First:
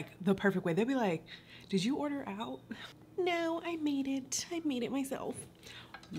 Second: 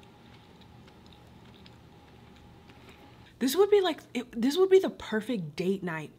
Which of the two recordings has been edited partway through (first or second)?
second